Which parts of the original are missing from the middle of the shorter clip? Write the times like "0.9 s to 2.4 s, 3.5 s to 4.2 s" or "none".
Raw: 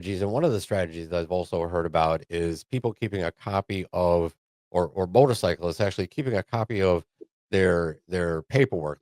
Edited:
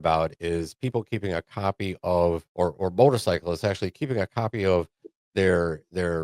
4.4 s to 4.6 s